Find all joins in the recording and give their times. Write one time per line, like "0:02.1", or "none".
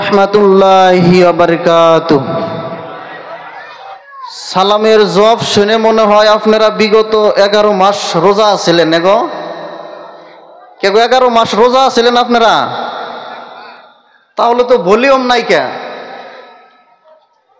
0:04.0